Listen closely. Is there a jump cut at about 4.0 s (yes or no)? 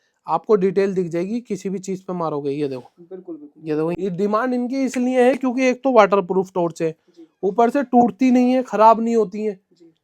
yes